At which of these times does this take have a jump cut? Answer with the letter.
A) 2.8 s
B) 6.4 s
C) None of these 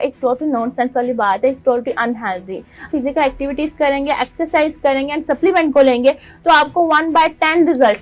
A